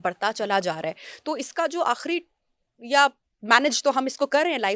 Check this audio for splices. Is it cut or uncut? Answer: uncut